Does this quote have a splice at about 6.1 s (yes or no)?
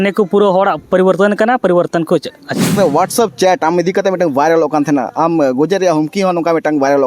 no